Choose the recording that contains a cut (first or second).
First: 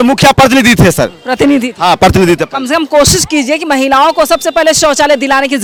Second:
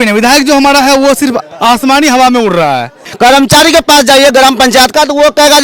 second